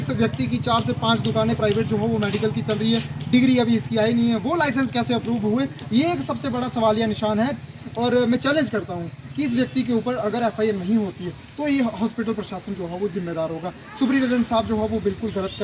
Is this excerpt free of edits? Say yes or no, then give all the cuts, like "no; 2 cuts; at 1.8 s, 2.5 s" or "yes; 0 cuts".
yes; 0 cuts